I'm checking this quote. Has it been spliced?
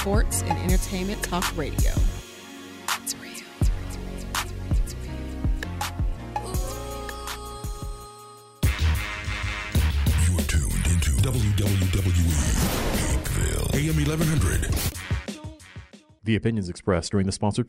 yes; 1 cut; at 8.4 s

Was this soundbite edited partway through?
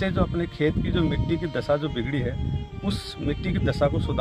no; 0 cuts

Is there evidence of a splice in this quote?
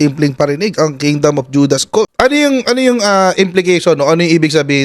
yes; 1 cut; at 2.1 s

